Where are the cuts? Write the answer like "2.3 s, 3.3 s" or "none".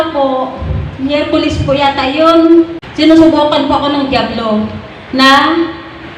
2.8 s